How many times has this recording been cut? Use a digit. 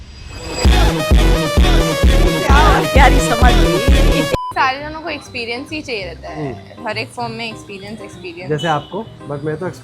1